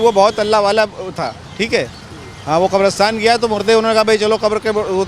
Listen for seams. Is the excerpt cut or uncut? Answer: uncut